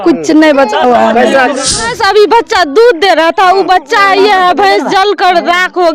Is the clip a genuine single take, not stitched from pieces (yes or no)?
no